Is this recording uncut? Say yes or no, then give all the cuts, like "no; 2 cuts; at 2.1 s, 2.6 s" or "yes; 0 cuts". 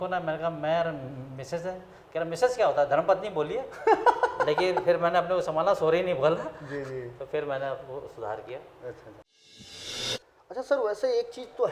yes; 0 cuts